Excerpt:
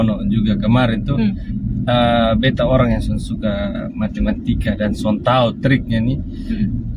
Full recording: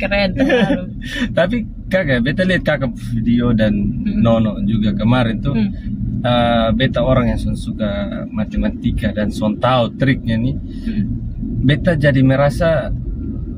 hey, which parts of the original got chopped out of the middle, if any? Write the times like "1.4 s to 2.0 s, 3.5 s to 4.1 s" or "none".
none